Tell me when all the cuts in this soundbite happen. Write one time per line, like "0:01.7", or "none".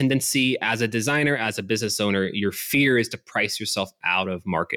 none